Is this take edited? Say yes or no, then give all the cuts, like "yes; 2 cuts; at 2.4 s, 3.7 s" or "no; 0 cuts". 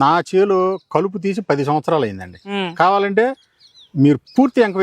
yes; 1 cut; at 2.5 s